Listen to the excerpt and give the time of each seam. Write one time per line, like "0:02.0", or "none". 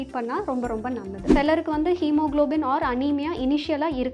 0:01.2